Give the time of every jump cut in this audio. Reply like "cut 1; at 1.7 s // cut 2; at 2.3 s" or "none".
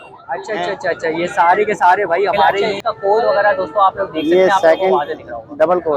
cut 1; at 2.7 s